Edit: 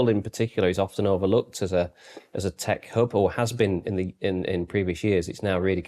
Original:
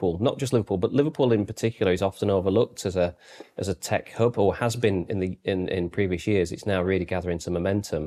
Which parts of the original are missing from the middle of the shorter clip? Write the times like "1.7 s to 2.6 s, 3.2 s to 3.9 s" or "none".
none